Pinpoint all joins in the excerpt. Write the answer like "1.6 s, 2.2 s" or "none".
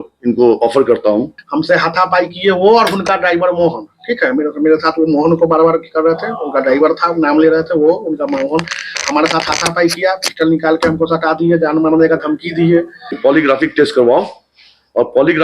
1.4 s, 13.1 s